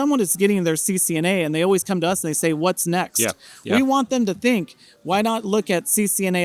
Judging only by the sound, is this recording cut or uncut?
uncut